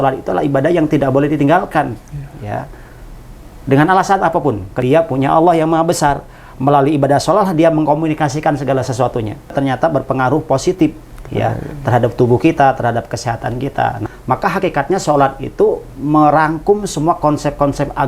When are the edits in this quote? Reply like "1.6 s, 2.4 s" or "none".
4.7 s, 9.5 s, 14.0 s